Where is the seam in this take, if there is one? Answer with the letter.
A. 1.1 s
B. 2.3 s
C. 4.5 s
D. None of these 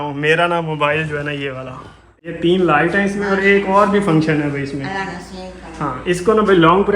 B